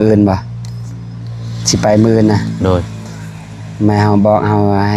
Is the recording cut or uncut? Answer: uncut